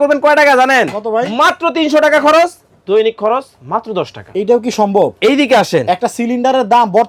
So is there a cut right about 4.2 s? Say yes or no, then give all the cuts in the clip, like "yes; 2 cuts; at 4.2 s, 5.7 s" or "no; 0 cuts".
no; 0 cuts